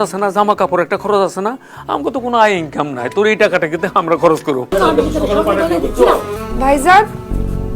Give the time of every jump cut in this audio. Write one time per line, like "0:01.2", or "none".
0:04.7
0:06.3